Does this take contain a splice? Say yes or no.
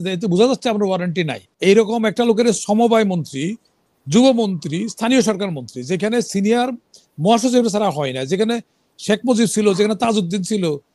yes